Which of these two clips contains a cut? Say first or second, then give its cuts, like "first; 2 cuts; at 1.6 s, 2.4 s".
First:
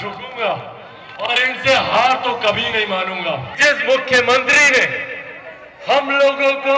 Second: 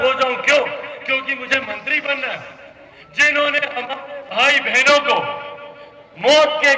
first; 1 cut; at 3.5 s